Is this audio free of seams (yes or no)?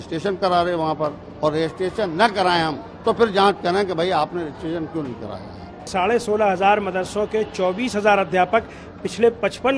no